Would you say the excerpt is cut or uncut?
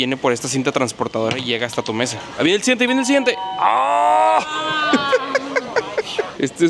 uncut